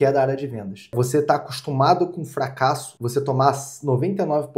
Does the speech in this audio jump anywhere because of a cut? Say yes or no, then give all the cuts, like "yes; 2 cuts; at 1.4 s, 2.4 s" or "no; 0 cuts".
yes; 2 cuts; at 0.9 s, 2.9 s